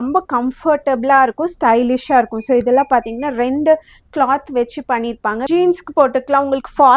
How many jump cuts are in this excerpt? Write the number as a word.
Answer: one